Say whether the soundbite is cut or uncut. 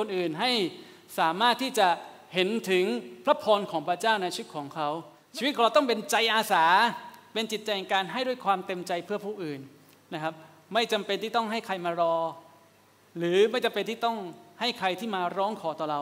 cut